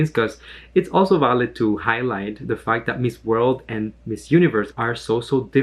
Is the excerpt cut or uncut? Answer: cut